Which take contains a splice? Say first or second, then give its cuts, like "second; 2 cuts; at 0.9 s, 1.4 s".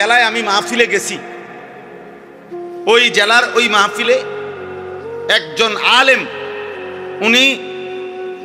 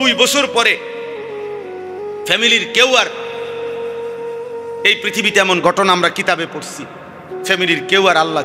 second; 2 cuts; at 0.8 s, 2.3 s